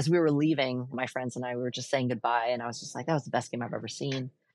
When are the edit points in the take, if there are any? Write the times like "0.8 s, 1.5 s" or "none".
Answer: 1.0 s